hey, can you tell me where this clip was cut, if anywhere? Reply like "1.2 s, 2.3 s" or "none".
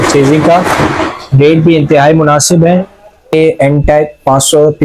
3.3 s